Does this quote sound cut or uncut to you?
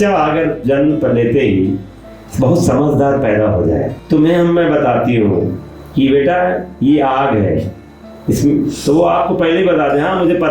cut